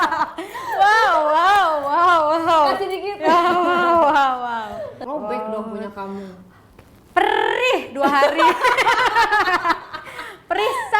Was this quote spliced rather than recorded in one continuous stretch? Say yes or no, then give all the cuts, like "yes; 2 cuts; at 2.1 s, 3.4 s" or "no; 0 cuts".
yes; 1 cut; at 5.0 s